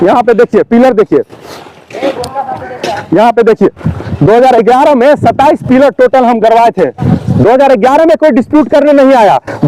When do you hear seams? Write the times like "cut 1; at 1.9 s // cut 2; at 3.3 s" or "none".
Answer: none